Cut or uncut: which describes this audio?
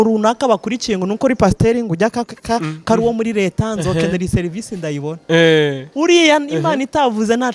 uncut